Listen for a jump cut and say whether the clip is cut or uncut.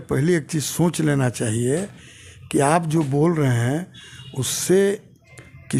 uncut